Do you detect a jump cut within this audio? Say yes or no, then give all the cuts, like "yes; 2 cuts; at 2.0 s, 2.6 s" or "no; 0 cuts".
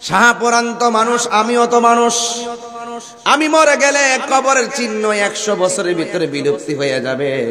no; 0 cuts